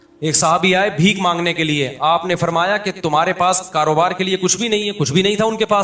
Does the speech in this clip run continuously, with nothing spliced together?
yes; 0 cuts

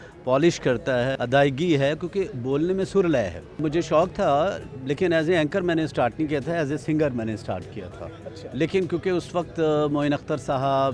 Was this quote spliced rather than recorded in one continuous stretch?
yes; 2 cuts; at 1.1 s, 3.6 s

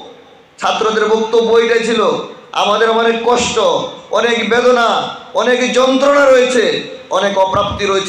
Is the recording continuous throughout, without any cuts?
yes; 0 cuts

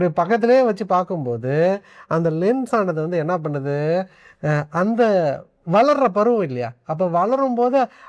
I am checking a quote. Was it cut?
no; 0 cuts

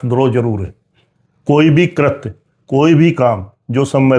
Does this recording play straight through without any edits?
yes; 0 cuts

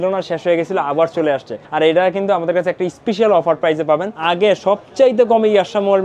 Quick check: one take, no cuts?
no; 2 cuts; at 1.6 s, 4.1 s

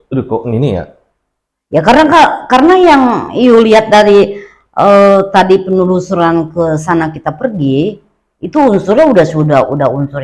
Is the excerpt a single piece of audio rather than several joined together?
yes; 0 cuts

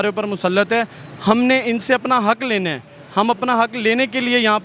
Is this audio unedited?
yes; 0 cuts

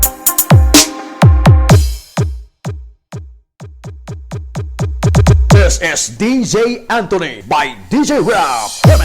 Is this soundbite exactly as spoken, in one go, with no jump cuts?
no; 1 cut; at 1.7 s

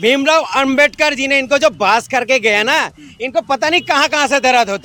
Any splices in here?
no; 0 cuts

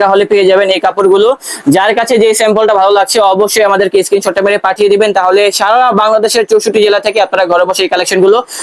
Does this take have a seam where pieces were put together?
no; 0 cuts

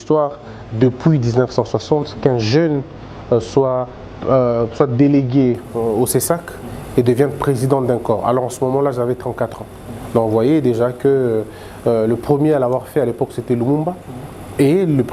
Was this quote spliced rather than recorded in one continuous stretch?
no; 0 cuts

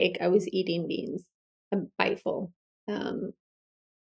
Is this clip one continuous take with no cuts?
yes; 0 cuts

